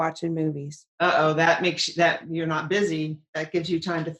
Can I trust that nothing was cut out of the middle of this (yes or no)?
yes